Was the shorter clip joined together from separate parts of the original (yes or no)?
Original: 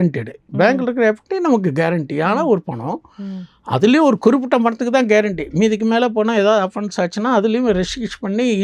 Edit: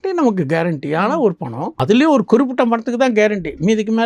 yes